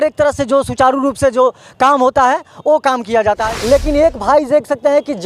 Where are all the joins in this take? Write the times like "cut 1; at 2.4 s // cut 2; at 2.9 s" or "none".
cut 1; at 3.4 s